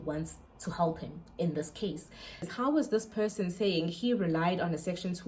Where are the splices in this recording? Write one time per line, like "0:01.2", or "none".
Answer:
0:02.4